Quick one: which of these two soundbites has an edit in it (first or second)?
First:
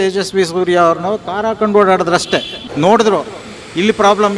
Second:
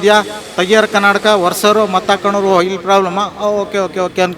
first